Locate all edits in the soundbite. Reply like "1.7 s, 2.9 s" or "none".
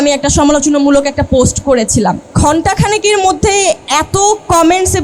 2.3 s, 3.8 s